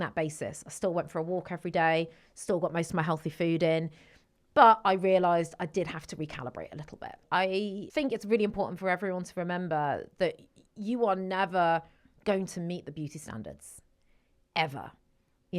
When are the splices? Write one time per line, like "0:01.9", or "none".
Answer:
0:07.2
0:07.8